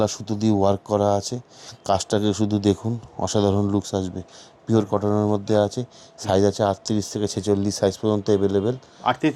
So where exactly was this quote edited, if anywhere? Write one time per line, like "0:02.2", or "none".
none